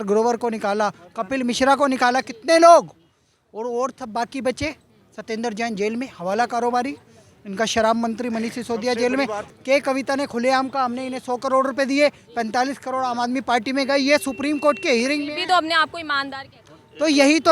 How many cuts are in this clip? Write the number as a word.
zero